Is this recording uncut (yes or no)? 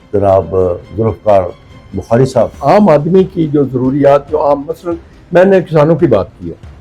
no